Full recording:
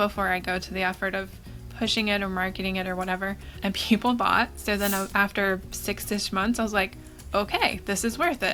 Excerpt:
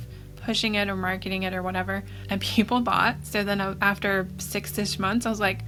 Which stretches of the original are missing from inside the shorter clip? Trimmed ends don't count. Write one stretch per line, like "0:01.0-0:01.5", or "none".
none